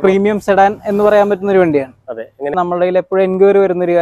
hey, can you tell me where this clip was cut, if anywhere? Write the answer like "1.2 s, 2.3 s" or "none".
2.5 s